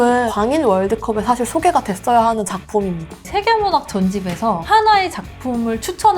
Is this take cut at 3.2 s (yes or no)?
yes